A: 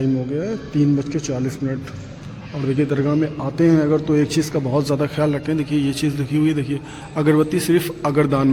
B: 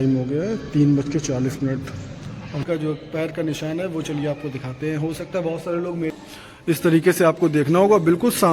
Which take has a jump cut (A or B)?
B